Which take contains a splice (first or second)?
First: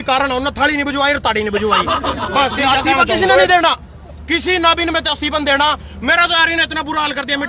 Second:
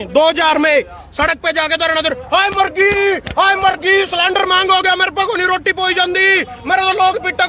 first